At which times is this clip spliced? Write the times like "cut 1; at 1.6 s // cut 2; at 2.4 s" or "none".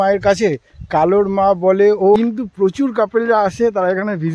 cut 1; at 2.2 s